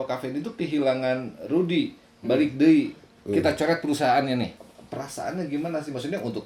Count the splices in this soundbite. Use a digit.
1